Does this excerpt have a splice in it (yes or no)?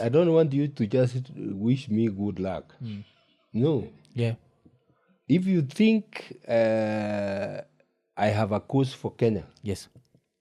no